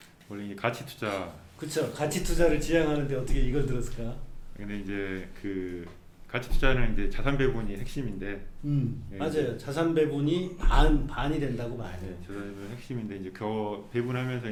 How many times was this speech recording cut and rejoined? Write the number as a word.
zero